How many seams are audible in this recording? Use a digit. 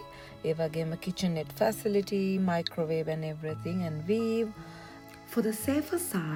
0